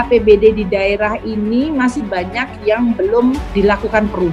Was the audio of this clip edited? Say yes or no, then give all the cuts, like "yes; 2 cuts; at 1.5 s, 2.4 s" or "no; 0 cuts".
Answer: no; 0 cuts